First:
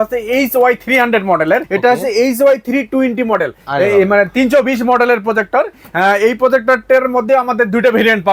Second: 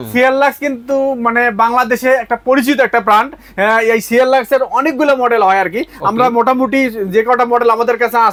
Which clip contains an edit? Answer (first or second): first